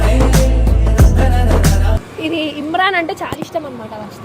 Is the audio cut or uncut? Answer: cut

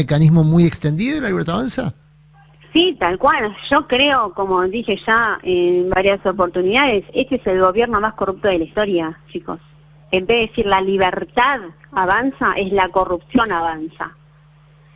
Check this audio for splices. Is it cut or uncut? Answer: uncut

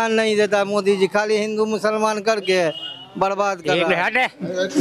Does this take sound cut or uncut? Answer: cut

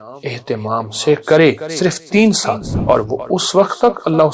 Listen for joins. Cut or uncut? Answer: cut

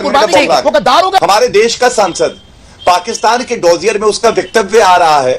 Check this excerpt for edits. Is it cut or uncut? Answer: cut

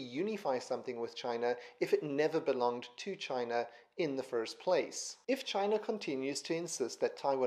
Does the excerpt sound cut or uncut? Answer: cut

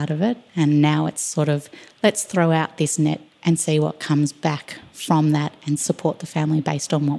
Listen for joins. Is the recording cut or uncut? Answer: uncut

